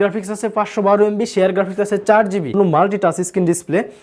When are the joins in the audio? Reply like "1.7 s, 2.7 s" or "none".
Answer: 2.6 s